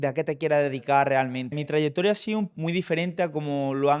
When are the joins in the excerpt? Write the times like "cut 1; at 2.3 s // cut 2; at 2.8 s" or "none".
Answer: cut 1; at 1.6 s // cut 2; at 2.5 s